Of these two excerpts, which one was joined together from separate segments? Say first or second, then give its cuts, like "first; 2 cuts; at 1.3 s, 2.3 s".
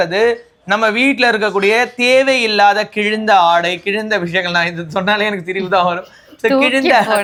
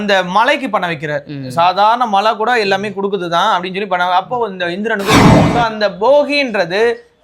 second; 1 cut; at 5.5 s